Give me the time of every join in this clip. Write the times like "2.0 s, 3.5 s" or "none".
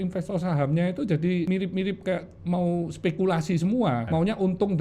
1.5 s, 4.1 s